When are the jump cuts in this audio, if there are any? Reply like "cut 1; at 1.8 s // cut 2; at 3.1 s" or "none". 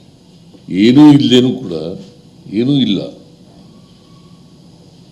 cut 1; at 2.9 s